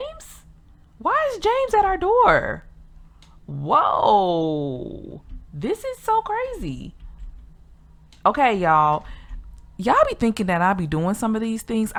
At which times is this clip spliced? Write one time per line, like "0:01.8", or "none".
none